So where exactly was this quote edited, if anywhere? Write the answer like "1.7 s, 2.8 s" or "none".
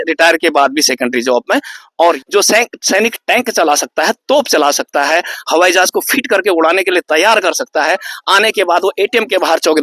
2.2 s

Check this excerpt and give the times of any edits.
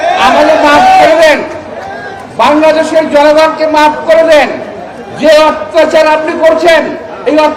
none

